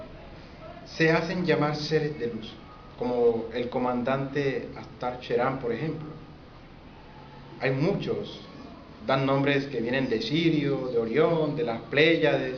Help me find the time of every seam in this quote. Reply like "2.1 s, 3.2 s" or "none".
0.9 s